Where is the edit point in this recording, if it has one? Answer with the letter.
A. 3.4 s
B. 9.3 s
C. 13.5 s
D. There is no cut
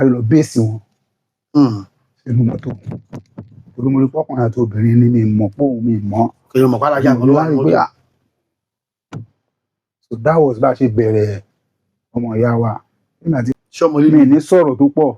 C